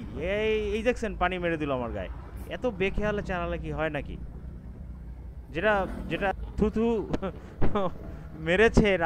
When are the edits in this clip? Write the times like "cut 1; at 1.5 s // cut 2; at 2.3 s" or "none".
cut 1; at 6.3 s